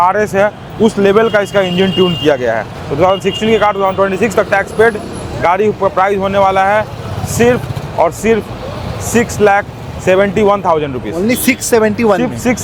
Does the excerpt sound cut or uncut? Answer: uncut